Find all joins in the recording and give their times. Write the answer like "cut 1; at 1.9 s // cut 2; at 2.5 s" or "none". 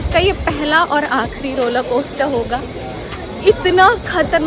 none